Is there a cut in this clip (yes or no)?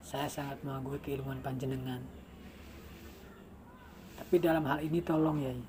no